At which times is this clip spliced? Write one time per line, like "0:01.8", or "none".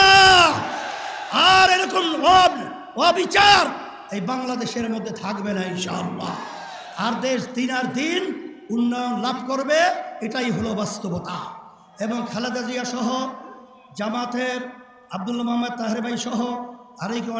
none